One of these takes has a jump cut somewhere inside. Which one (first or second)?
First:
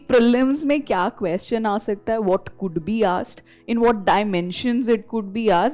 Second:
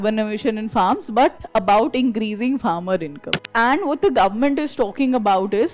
second